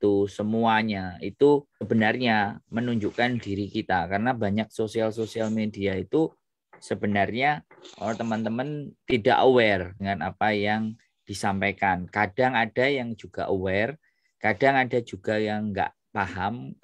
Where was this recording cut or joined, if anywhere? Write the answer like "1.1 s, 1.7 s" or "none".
1.9 s, 8.9 s, 9.9 s